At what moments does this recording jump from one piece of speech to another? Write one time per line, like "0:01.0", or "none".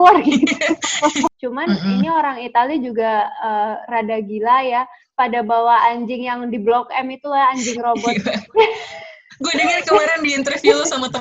0:01.3